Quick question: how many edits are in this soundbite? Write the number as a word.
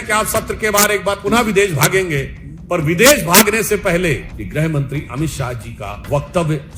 two